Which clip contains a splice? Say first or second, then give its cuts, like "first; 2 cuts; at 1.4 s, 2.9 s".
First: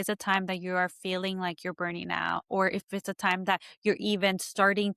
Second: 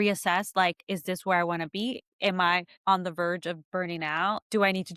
second; 1 cut; at 2.4 s